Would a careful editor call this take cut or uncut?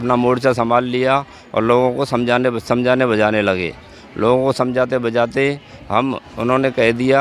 uncut